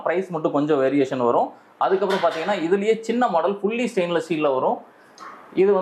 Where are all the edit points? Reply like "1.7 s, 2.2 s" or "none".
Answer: none